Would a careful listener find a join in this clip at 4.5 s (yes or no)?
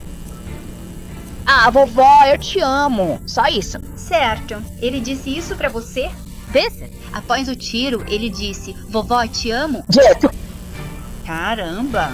no